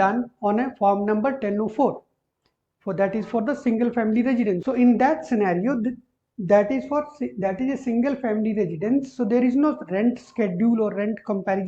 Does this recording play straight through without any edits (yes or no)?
no